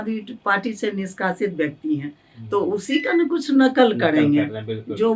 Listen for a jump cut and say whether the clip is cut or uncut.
uncut